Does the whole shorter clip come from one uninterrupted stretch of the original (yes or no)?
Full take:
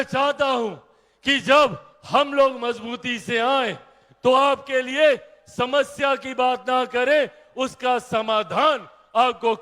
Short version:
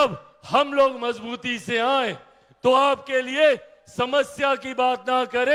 yes